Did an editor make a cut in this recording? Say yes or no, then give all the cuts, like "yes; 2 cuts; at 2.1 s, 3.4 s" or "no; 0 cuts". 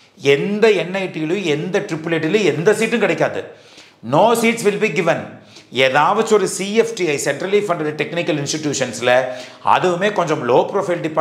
no; 0 cuts